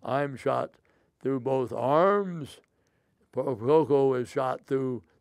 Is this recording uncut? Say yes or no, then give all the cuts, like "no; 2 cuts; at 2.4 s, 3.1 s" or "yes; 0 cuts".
yes; 0 cuts